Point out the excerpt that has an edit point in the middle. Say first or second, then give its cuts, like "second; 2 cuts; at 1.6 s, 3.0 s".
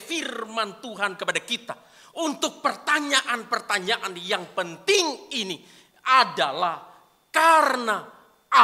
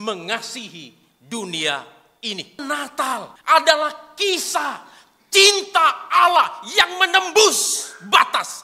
second; 1 cut; at 3.0 s